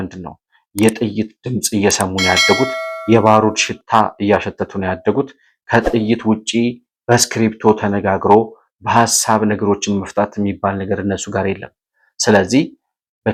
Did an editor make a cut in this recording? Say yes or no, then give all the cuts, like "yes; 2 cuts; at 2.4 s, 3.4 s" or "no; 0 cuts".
no; 0 cuts